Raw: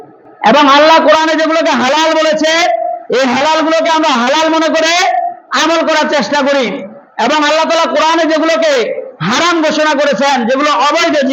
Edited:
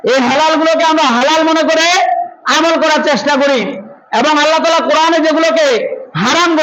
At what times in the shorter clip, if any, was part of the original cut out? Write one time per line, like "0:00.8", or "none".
none